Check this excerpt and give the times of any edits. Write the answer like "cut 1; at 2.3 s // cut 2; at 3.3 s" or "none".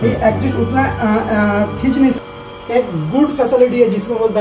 cut 1; at 2.1 s